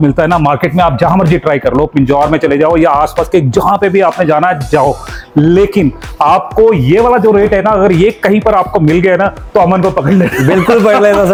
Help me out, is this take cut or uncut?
uncut